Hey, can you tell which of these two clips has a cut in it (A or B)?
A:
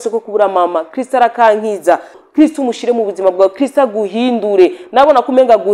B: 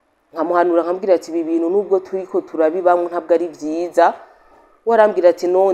A